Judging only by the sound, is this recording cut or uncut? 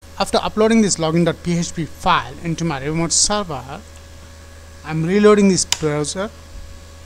uncut